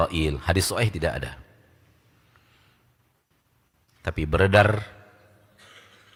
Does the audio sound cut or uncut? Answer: uncut